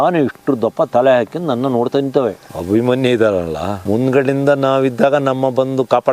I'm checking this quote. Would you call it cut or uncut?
cut